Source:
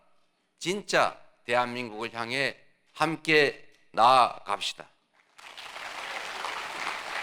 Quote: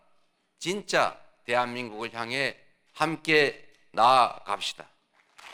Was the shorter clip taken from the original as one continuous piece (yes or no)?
yes